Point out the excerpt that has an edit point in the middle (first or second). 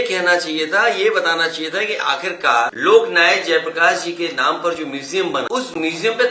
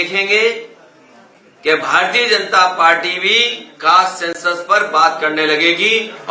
first